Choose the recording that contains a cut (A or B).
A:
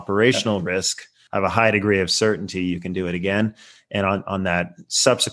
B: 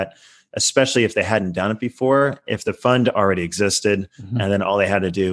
A